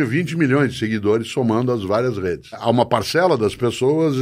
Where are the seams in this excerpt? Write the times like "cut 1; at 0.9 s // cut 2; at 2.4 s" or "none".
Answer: cut 1; at 2.6 s